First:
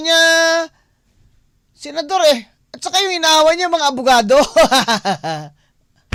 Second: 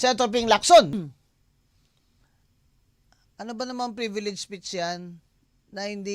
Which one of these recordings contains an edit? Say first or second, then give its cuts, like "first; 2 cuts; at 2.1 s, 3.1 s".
second; 1 cut; at 0.9 s